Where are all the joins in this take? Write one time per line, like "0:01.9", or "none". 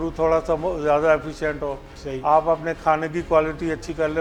none